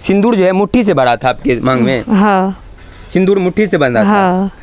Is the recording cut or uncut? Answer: uncut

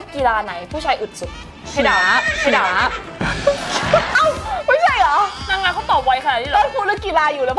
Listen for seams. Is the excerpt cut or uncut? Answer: cut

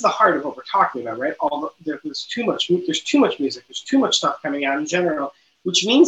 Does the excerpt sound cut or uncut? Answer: uncut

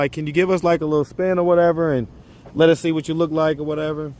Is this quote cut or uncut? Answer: uncut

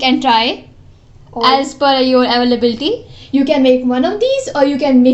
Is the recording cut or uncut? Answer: uncut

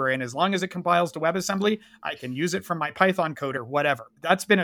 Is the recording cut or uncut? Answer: cut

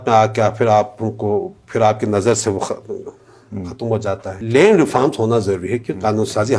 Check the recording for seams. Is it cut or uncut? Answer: cut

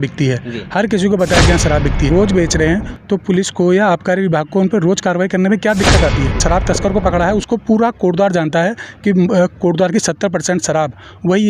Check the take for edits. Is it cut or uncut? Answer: cut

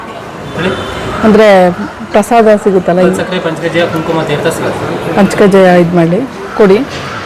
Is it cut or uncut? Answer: uncut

